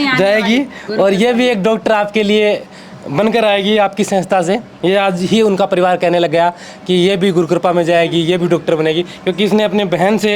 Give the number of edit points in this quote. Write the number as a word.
zero